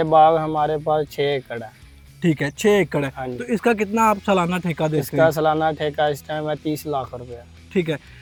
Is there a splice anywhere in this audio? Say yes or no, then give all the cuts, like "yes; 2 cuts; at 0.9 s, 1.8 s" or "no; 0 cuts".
no; 0 cuts